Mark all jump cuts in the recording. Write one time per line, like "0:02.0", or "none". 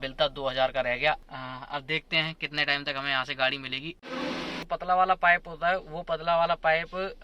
0:01.2
0:04.6